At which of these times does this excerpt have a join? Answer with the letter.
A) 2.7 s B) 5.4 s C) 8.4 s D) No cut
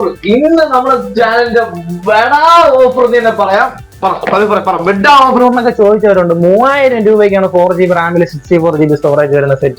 B